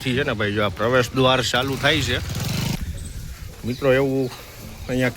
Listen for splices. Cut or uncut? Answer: cut